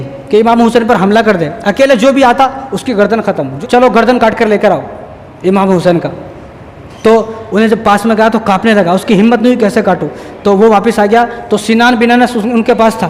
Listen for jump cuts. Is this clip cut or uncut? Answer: cut